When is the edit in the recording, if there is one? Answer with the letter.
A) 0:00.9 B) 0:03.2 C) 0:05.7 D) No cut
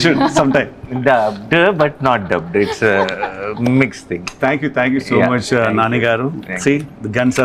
D